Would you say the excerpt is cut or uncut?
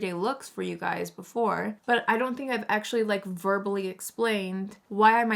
uncut